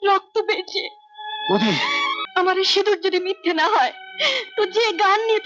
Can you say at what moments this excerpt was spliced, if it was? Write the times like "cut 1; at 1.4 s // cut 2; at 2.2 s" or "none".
cut 1; at 2.2 s